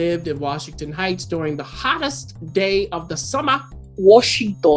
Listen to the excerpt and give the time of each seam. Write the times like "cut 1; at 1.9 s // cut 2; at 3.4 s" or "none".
cut 1; at 3.8 s